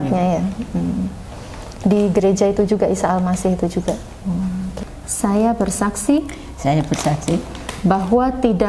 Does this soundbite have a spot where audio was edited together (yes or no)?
yes